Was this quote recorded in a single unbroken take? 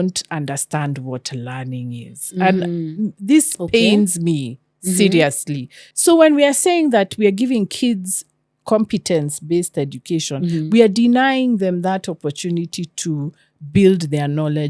no; 1 cut; at 5.8 s

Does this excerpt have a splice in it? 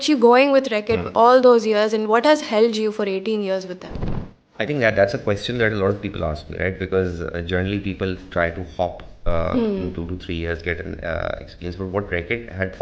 no; 0 cuts

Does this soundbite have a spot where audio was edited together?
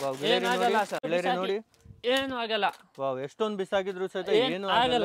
yes; 1 cut; at 1.1 s

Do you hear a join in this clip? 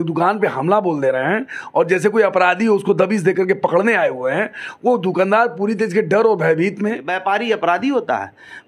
yes; 1 cut; at 7.1 s

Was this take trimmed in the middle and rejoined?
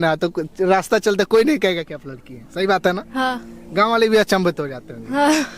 no; 0 cuts

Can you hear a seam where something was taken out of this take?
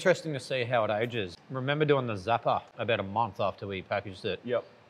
yes; 2 cuts; at 1.3 s, 2.7 s

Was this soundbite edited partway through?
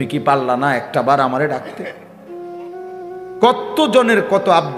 yes; 2 cuts; at 1.9 s, 3.4 s

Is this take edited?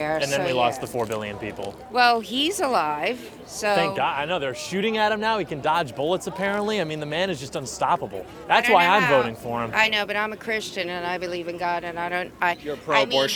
no; 0 cuts

